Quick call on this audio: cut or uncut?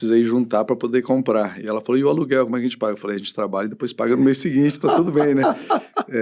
uncut